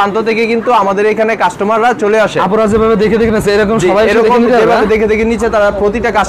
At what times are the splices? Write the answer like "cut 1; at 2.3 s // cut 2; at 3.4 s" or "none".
none